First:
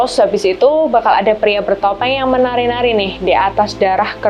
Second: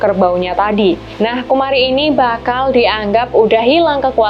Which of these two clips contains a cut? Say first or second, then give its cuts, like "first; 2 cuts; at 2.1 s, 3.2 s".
second; 1 cut; at 1.1 s